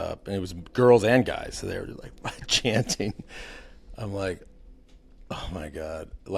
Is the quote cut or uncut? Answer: uncut